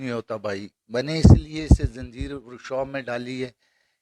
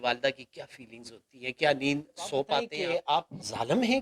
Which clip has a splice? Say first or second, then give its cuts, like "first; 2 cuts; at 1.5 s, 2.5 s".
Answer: second; 1 cut; at 2.8 s